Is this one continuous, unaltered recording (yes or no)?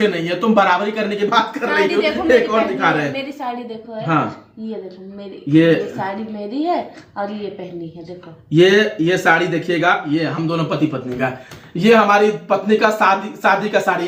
yes